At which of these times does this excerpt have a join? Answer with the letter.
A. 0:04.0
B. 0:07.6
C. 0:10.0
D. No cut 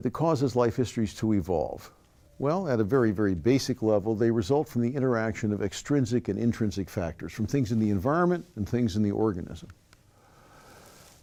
D